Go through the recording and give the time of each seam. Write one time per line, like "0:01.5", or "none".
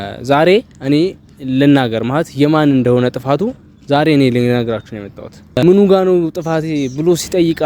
0:05.6

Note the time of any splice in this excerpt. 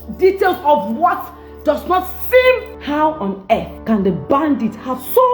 0:02.7
0:03.7

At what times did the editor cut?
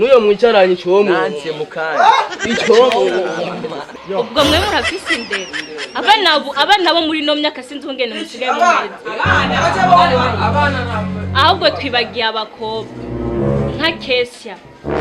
none

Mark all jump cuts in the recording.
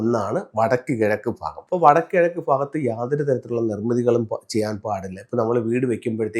0:01.5

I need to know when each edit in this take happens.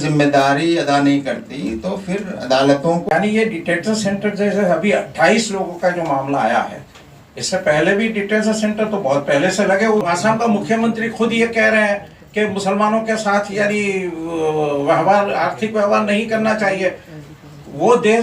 0:03.0
0:10.0

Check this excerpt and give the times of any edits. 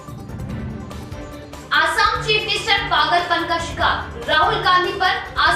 0:01.3

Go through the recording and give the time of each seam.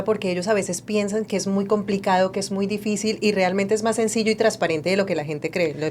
none

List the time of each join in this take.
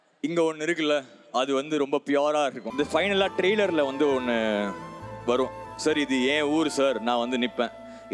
0:02.6

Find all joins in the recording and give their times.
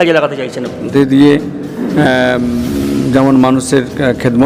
0:00.9

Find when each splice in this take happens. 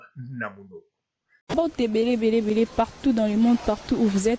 0:01.5

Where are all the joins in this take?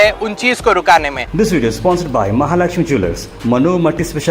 0:01.2

